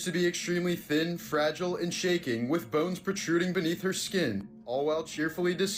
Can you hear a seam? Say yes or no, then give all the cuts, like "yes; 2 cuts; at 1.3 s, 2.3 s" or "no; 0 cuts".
no; 0 cuts